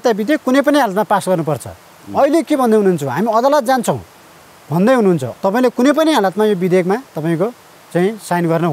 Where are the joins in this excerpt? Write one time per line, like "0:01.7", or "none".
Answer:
0:05.3